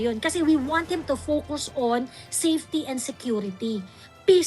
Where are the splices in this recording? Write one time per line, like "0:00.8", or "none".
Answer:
none